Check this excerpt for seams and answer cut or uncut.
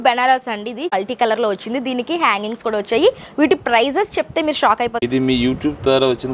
cut